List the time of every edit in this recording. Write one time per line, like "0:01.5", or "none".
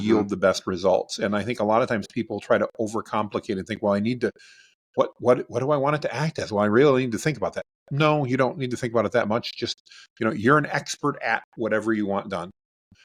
none